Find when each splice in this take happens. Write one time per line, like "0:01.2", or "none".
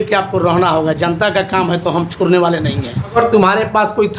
0:03.2